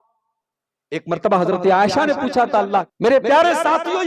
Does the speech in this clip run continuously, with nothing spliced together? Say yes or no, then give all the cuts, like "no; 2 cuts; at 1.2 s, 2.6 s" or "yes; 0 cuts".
no; 1 cut; at 2.9 s